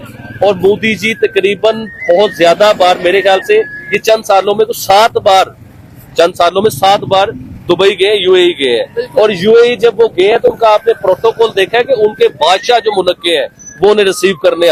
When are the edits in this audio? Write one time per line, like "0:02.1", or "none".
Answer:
none